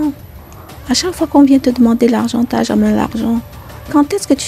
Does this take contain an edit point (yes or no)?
no